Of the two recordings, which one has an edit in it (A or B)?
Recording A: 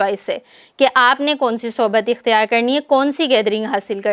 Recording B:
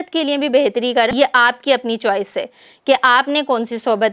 B